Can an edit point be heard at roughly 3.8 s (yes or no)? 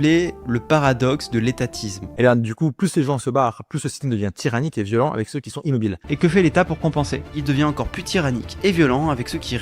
no